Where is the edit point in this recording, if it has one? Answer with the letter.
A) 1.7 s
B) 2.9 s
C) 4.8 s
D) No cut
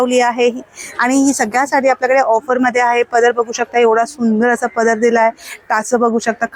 D